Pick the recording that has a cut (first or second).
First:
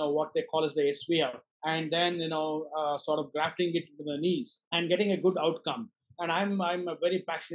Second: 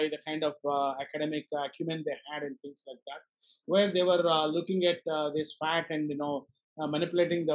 first